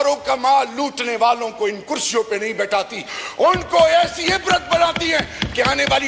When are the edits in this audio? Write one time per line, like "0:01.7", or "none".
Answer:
none